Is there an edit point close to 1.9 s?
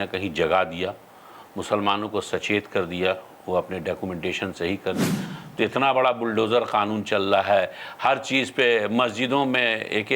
no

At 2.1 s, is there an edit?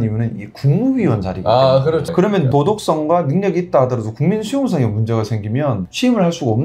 yes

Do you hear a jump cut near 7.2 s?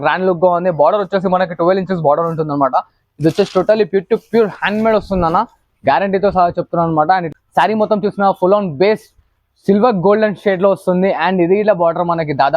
yes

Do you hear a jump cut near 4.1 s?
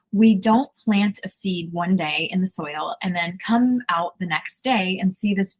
no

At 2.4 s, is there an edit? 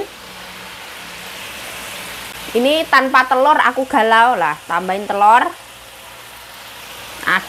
yes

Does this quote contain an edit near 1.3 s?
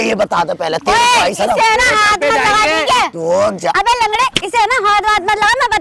no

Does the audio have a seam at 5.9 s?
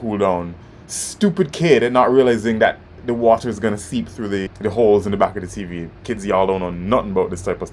no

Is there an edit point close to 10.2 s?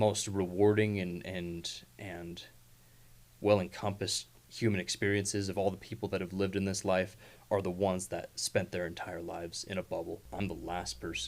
yes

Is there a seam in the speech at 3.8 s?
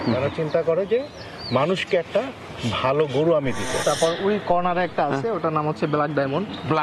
yes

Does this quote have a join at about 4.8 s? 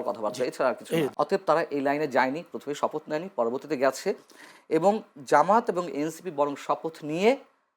no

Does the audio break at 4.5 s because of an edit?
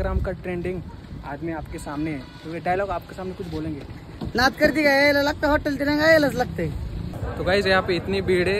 no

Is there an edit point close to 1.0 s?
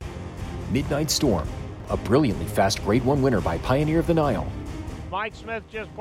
no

